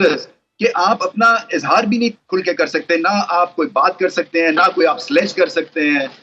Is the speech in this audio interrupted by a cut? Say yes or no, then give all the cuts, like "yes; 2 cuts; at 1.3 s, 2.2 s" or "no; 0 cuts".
no; 0 cuts